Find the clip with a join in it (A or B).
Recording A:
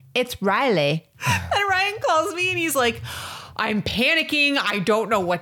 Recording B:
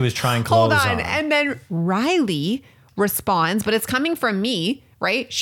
A